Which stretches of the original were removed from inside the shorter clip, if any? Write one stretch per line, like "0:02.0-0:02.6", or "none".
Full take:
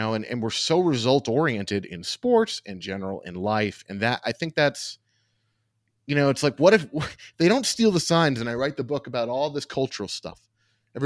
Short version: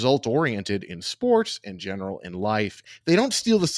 0:03.9-0:07.2